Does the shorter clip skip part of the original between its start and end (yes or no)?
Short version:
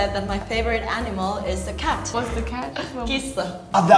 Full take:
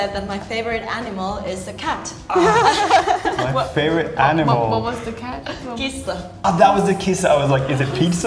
yes